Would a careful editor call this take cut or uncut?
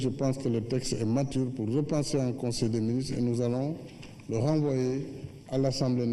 cut